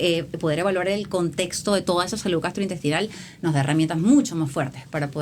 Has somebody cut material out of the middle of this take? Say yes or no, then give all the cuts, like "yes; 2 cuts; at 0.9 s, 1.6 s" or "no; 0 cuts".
no; 0 cuts